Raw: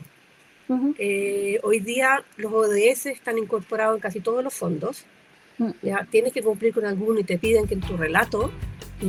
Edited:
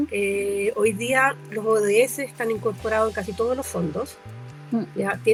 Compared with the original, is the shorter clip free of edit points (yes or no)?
yes